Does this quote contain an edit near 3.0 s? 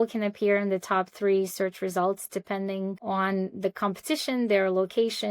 yes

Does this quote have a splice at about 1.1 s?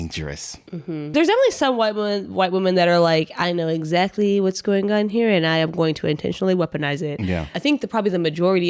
yes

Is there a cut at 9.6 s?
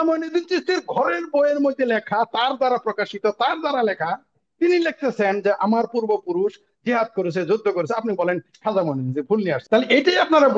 yes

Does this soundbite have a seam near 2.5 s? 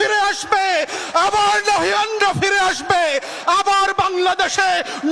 yes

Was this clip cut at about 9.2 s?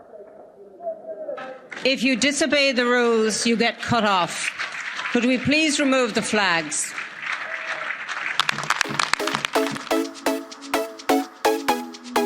yes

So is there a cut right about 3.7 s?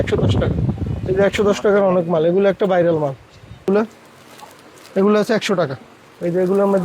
yes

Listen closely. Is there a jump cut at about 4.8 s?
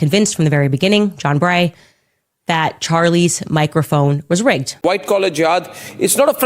yes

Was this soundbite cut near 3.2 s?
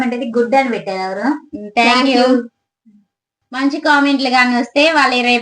yes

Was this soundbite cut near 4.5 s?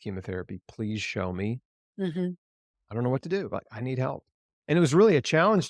yes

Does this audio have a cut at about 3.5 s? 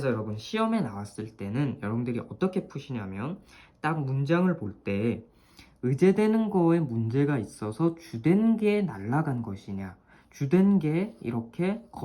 no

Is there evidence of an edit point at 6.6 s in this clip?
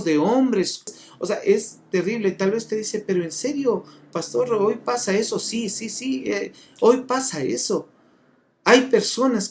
no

